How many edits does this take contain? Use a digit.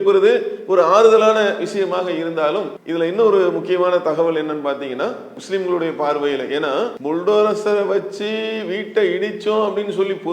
2